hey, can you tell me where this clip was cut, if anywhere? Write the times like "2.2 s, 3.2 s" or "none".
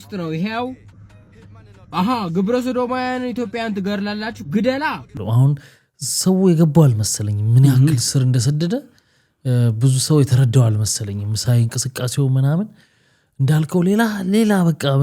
5.1 s